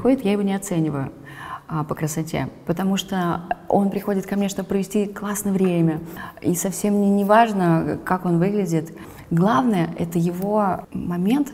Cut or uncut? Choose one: uncut